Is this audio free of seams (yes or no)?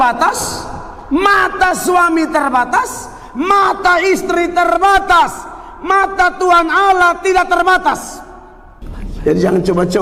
yes